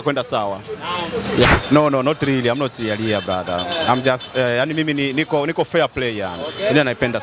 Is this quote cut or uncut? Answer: cut